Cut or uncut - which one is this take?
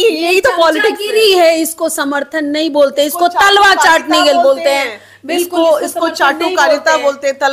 uncut